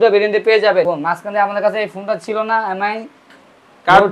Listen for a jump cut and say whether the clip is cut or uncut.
cut